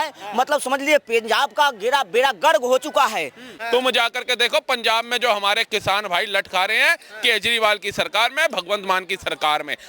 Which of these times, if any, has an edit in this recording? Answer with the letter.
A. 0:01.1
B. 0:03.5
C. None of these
B